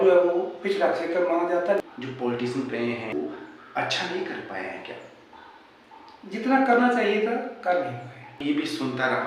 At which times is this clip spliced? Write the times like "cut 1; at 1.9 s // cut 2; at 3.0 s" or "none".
cut 1; at 1.8 s // cut 2; at 3.1 s // cut 3; at 8.3 s

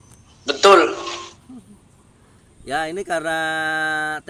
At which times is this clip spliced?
none

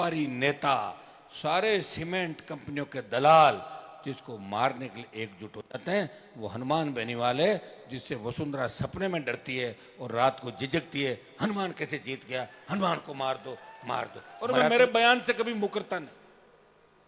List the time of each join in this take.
cut 1; at 14.7 s

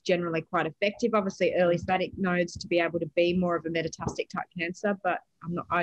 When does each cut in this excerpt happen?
cut 1; at 1.8 s

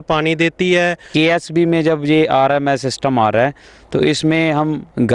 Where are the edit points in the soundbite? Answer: cut 1; at 1.1 s

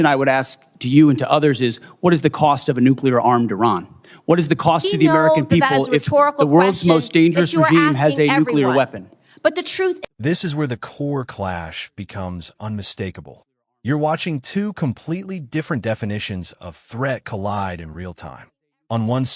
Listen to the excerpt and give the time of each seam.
none

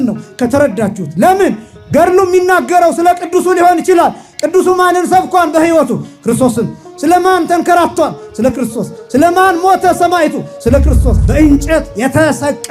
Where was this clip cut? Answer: cut 1; at 11.2 s

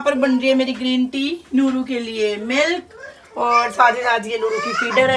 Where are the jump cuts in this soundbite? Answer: none

